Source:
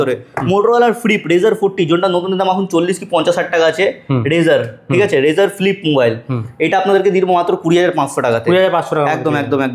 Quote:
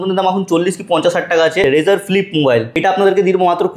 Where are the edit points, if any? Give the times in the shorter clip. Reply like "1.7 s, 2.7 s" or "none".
1.6 s, 2.7 s